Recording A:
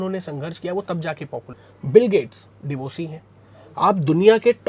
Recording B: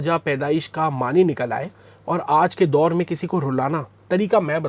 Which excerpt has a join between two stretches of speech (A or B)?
A